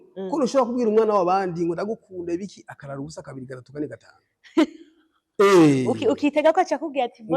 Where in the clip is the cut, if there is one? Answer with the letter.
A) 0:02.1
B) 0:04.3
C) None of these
C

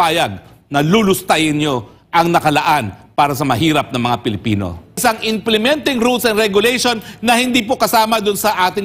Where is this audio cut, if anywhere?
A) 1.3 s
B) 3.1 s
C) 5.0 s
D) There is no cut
C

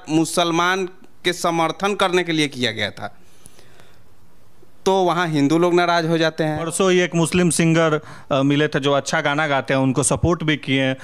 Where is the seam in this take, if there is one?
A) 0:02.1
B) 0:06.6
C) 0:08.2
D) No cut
B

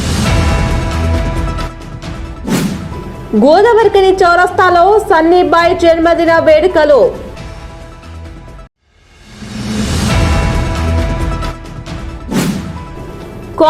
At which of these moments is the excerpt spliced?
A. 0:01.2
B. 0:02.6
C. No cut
B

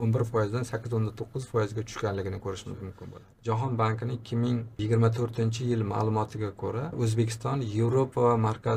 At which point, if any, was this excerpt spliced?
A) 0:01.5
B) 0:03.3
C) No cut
B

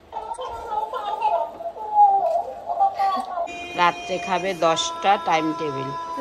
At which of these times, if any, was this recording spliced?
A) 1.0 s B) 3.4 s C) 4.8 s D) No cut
B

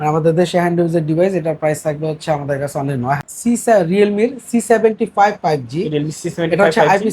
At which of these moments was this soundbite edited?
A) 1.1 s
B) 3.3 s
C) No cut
B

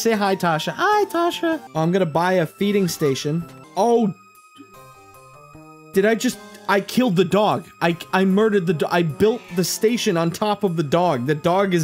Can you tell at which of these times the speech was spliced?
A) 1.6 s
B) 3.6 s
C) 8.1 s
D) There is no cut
A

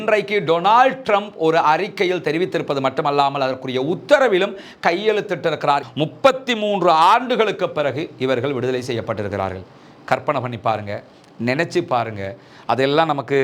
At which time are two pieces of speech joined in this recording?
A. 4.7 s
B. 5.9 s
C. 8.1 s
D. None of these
B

